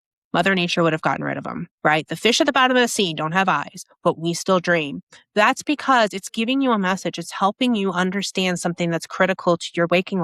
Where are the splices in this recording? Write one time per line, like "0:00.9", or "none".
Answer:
none